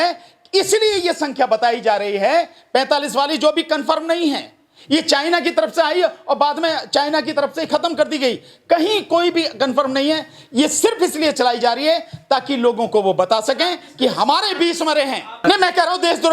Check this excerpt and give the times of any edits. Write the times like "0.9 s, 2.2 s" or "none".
15.4 s